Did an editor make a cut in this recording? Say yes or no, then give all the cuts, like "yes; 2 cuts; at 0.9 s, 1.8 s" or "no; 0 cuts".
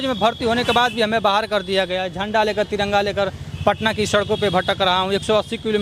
no; 0 cuts